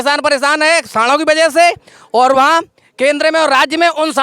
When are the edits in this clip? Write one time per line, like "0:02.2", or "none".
none